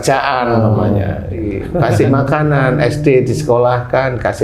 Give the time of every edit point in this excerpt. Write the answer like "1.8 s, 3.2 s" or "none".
1.6 s